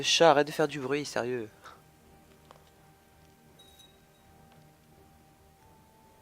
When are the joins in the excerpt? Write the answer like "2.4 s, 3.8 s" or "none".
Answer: 3.0 s